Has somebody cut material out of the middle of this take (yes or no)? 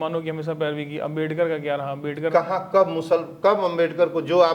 no